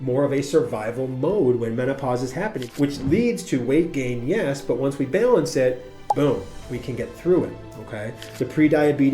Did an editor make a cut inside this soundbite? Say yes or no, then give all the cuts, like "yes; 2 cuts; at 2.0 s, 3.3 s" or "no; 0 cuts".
yes; 2 cuts; at 2.6 s, 8.2 s